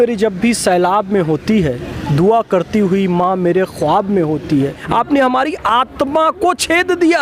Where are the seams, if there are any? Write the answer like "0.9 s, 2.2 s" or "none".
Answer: 4.8 s